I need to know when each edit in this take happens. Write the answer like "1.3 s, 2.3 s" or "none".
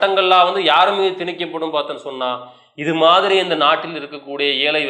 none